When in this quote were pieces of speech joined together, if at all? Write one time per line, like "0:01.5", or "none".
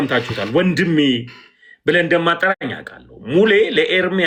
none

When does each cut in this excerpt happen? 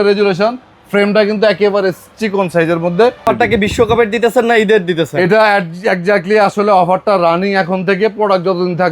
0:03.2

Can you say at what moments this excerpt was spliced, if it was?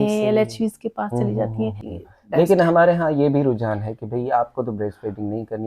0:01.9

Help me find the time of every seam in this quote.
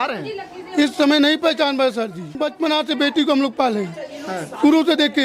0:02.3

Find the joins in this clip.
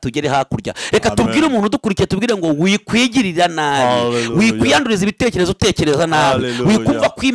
none

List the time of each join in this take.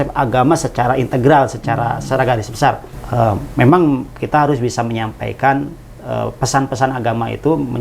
0:02.9

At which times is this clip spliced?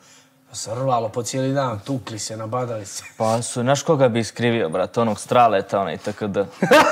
0:03.1

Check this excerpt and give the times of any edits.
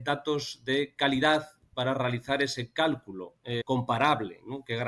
0:03.6

